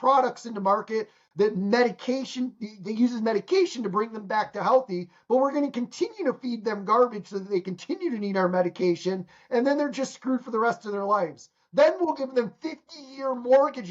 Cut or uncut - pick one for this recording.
uncut